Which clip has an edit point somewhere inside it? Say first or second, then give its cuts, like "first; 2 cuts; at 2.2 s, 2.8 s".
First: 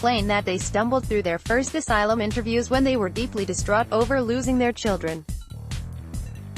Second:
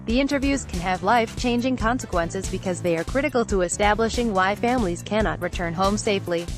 first; 1 cut; at 5.2 s